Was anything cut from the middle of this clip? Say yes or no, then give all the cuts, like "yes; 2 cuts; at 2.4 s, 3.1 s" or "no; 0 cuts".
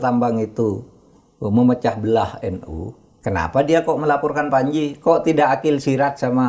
no; 0 cuts